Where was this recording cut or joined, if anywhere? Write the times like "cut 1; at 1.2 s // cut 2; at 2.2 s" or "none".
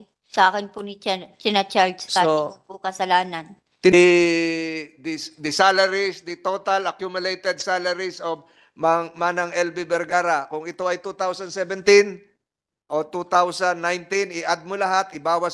cut 1; at 3.9 s